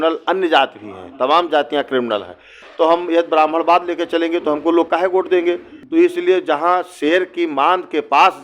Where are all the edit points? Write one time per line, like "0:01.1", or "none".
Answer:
0:02.6
0:05.7